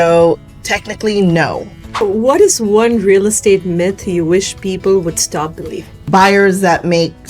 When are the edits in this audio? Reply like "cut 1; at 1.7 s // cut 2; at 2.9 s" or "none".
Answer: cut 1; at 2.0 s // cut 2; at 6.0 s